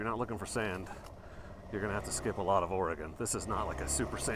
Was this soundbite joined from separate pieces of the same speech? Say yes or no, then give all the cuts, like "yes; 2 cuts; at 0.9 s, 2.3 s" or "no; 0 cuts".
no; 0 cuts